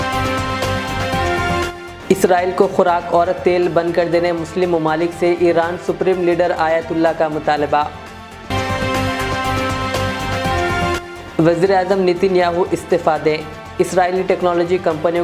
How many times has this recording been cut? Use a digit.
1